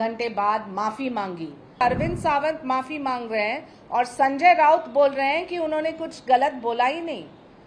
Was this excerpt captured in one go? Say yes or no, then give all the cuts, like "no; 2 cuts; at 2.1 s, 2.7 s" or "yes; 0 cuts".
no; 1 cut; at 1.8 s